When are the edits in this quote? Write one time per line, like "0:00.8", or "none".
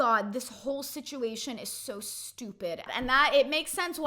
0:02.9